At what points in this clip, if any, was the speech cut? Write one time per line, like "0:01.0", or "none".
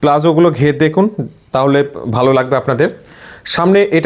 none